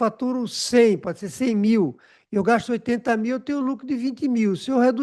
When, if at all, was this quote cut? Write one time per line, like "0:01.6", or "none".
none

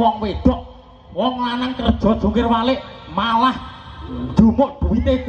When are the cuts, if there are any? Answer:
none

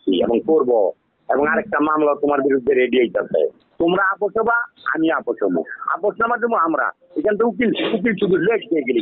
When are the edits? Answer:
0:03.6

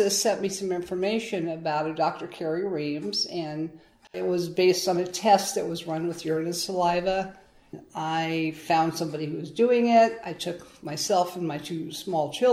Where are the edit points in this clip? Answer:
0:04.2
0:07.8

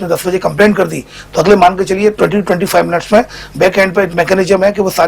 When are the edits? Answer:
0:04.1

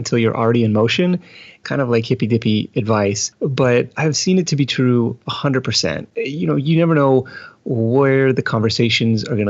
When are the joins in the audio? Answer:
0:01.6
0:03.8
0:06.1

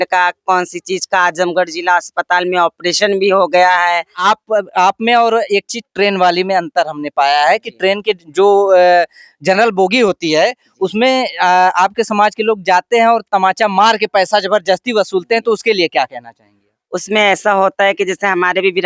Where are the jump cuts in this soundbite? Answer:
0:04.1

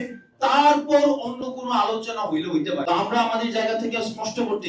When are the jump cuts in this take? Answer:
0:02.8

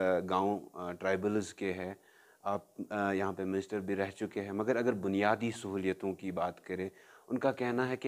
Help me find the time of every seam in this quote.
none

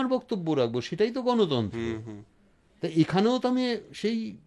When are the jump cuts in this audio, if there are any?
none

